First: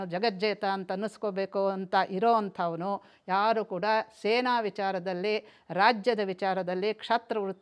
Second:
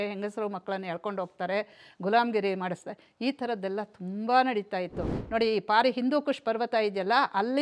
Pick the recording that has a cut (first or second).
second